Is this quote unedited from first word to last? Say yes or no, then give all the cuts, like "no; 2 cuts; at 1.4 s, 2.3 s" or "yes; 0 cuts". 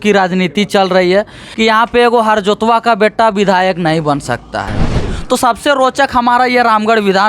no; 2 cuts; at 1.4 s, 5.1 s